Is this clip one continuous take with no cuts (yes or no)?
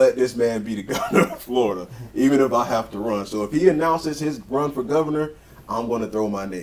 yes